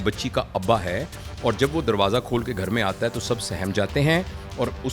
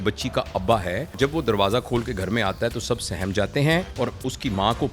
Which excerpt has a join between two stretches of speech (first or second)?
second